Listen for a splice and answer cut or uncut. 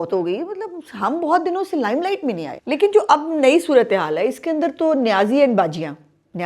cut